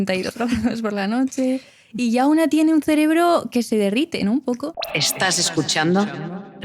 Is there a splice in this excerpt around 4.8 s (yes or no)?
yes